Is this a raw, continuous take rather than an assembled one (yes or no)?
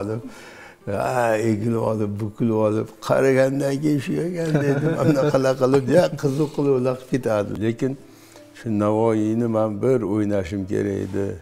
no